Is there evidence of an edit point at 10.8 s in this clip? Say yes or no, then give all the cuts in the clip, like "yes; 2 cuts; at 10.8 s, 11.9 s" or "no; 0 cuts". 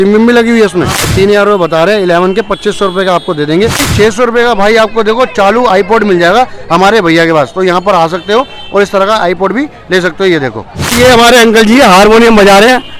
yes; 3 cuts; at 1.1 s, 3.9 s, 10.8 s